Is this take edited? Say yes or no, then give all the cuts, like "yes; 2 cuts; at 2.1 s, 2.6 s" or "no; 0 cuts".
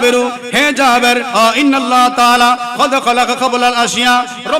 yes; 1 cut; at 1.3 s